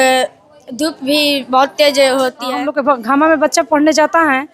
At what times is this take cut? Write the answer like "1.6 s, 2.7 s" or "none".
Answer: 2.4 s